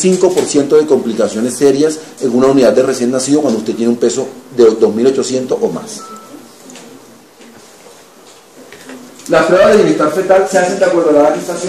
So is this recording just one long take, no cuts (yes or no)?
no